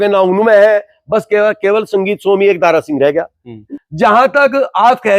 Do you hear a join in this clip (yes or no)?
yes